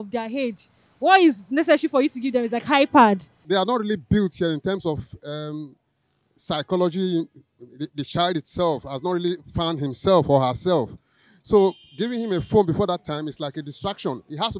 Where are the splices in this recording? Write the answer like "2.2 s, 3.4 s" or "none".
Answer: 3.3 s